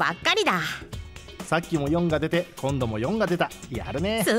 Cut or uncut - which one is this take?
cut